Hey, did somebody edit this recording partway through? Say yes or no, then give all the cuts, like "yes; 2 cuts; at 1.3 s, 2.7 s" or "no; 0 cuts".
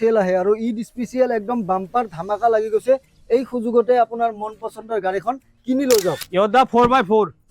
yes; 1 cut; at 6.2 s